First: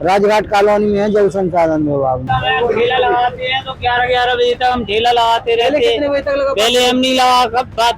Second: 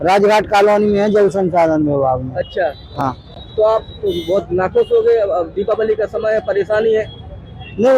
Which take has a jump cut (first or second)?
first